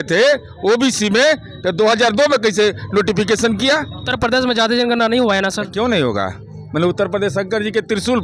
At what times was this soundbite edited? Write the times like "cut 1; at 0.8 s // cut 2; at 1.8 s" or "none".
cut 1; at 4.0 s